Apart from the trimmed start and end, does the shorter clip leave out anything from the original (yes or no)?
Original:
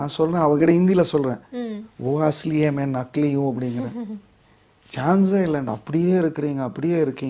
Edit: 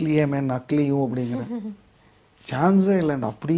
no